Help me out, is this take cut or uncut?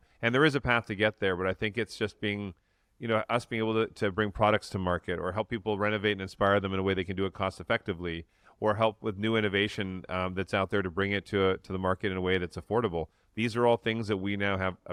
uncut